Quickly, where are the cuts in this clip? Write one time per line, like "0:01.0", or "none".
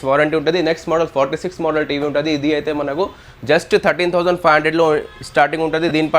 none